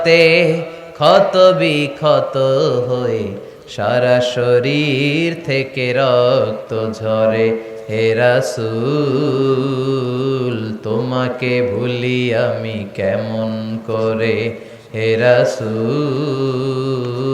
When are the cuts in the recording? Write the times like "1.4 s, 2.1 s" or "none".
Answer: none